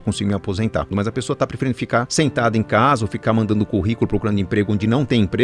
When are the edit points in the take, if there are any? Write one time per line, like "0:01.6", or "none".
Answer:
0:00.9
0:02.1